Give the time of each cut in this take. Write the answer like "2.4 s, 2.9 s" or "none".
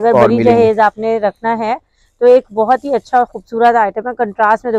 none